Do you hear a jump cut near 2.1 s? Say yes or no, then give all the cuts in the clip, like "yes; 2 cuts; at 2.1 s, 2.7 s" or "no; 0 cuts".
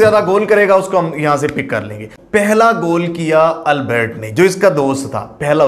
yes; 1 cut; at 2.1 s